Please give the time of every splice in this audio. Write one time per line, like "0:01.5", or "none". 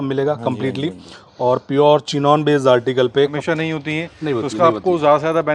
0:03.4